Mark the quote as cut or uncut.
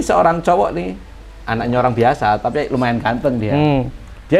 uncut